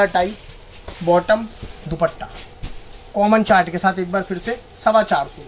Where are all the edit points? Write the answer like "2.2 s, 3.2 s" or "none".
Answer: none